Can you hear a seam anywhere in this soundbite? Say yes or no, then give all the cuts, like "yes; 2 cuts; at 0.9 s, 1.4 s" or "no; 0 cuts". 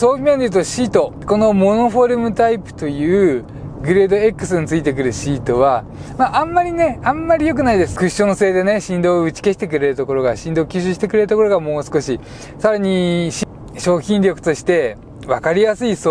yes; 3 cuts; at 1.2 s, 7.9 s, 13.4 s